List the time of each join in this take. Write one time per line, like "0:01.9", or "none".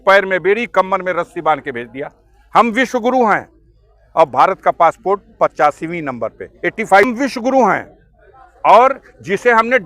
0:07.1